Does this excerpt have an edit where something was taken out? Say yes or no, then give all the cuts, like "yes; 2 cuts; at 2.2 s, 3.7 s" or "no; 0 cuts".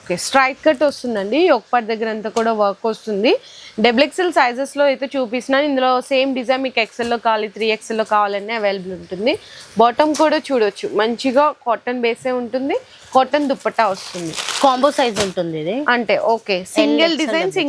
no; 0 cuts